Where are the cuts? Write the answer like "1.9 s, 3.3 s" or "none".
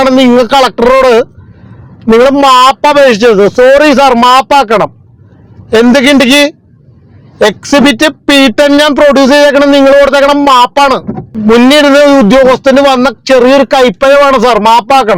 none